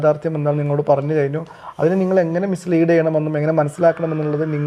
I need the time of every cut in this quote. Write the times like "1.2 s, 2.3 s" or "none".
none

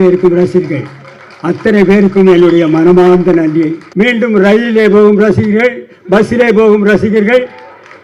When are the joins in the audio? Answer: 3.8 s

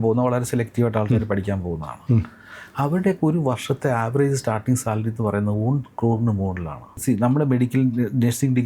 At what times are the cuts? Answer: 7.0 s

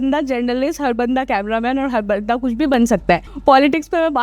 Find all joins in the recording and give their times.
3.3 s

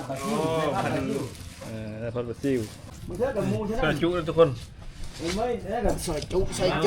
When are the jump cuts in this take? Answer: 3.0 s

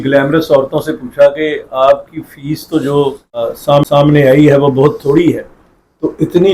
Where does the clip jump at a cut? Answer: 3.8 s

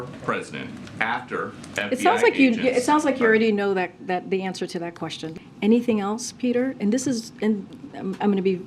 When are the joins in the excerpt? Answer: 5.3 s

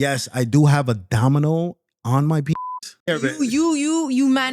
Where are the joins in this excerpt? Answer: 3.1 s

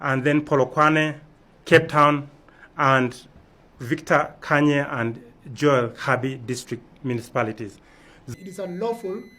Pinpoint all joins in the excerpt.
8.2 s

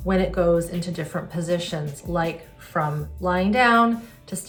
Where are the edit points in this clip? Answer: none

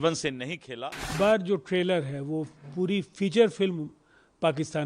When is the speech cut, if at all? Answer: 1.1 s

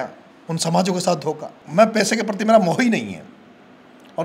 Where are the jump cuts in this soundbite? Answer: 1.5 s

